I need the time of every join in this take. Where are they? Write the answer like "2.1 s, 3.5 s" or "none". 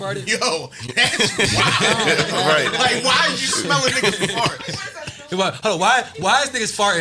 none